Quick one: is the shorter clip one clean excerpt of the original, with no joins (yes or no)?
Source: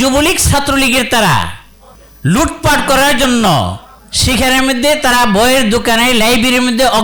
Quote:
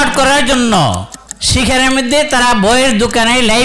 yes